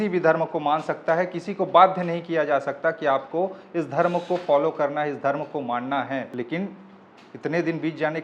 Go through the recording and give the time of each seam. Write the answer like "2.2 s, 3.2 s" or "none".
none